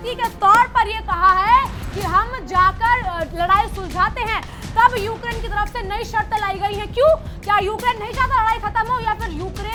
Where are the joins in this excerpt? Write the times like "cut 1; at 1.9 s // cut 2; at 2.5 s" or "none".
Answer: none